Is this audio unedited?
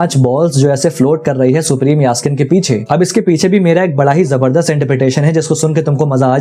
yes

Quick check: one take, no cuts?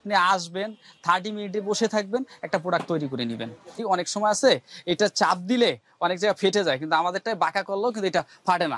no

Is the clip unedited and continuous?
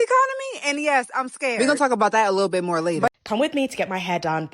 no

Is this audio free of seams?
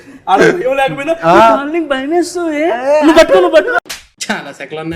yes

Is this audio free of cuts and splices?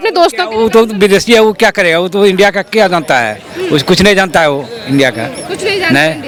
yes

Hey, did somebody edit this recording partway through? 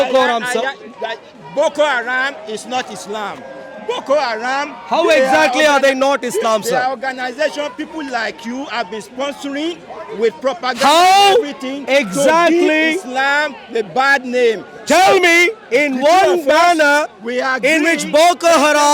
no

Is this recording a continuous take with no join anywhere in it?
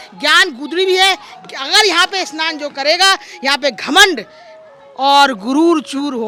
yes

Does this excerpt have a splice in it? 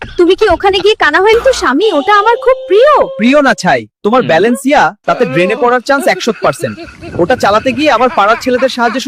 yes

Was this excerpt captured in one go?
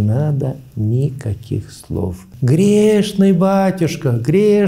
no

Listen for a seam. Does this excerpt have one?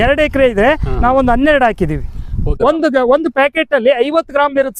yes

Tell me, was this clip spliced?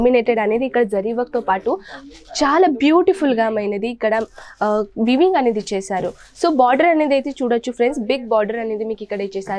no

